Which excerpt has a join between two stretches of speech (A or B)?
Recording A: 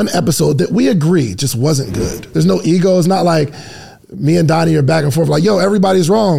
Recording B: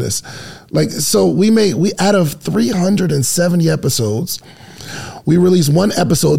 A